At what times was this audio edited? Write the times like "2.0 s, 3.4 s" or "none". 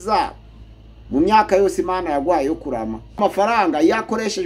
3.2 s